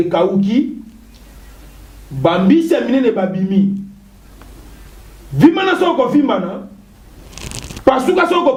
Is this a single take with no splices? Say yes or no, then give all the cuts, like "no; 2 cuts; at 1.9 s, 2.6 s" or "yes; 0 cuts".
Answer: yes; 0 cuts